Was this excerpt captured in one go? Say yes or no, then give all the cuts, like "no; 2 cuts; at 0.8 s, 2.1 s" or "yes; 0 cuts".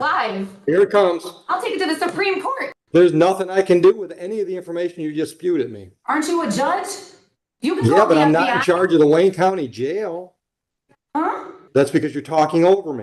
no; 2 cuts; at 2.7 s, 11.5 s